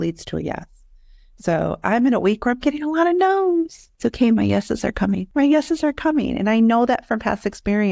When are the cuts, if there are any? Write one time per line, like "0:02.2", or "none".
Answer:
0:03.8
0:05.2